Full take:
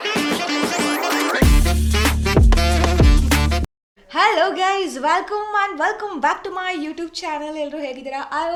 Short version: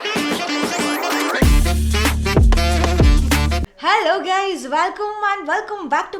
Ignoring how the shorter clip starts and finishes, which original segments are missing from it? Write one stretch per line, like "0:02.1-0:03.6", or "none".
0:03.7-0:04.0